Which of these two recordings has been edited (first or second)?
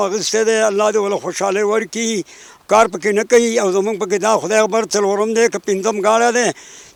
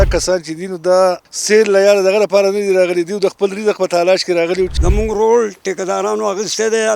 second